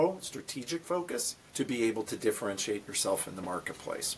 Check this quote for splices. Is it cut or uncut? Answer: cut